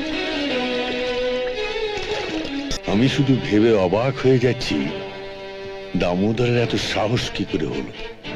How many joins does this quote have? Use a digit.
1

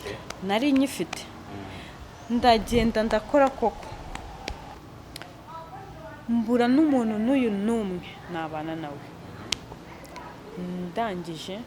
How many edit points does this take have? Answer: 1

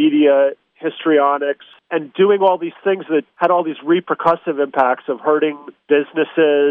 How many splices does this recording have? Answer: 2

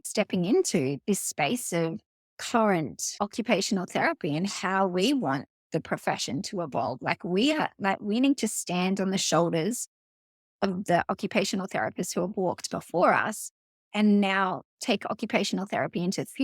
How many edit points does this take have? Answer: 1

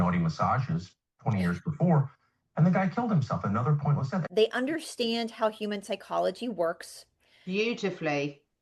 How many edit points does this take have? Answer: 1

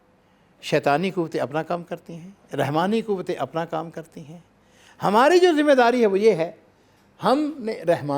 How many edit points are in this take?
0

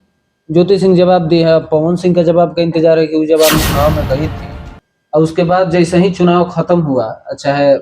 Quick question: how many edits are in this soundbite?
1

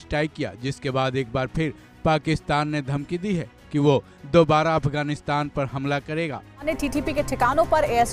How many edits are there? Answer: 1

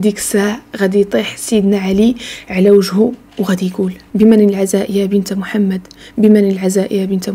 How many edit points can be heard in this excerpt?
0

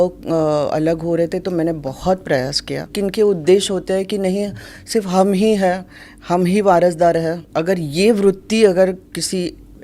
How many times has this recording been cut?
2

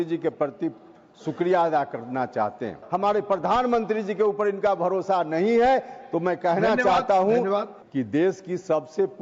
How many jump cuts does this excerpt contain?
2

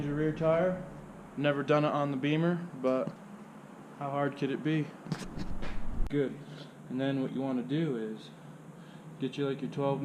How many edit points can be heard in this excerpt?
1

